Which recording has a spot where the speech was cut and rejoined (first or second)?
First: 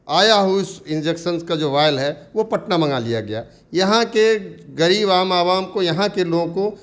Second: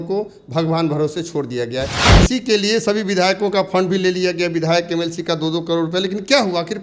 second